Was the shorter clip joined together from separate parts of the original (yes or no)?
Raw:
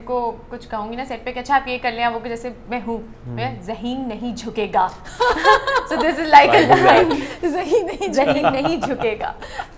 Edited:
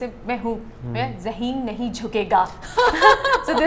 no